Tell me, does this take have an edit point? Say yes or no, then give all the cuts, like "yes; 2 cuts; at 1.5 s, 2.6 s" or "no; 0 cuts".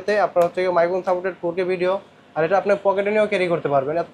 no; 0 cuts